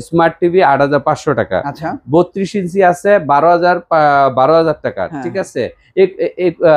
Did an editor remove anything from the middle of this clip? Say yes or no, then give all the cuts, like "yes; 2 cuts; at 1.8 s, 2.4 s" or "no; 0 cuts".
no; 0 cuts